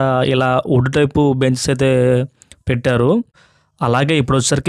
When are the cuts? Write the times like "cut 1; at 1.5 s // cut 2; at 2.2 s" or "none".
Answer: cut 1; at 3.4 s